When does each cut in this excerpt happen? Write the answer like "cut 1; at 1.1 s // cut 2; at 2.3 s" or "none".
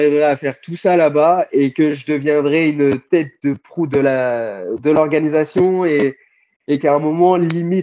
none